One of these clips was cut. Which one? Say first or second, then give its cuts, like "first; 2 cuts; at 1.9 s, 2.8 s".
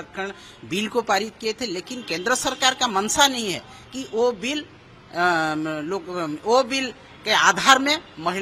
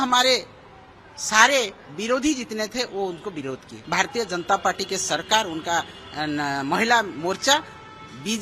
second; 1 cut; at 3.7 s